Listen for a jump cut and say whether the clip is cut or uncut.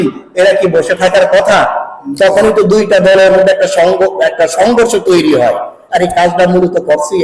uncut